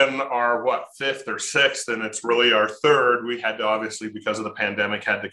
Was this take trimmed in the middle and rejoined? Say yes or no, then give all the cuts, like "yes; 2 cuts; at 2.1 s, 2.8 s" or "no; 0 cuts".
no; 0 cuts